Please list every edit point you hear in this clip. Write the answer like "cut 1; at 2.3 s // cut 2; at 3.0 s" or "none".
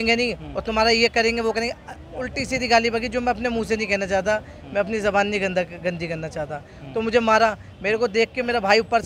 none